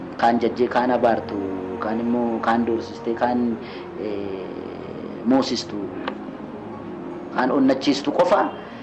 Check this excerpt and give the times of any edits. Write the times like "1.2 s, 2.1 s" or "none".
none